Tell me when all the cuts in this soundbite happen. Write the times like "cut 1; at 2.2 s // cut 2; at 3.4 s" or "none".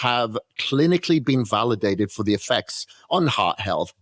none